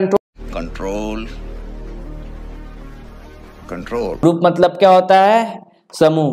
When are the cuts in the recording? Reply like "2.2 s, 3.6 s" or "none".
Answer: 4.2 s